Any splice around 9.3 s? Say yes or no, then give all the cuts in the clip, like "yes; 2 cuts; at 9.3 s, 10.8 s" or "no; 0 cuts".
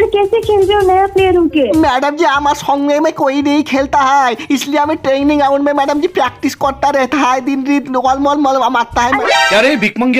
yes; 1 cut; at 9.3 s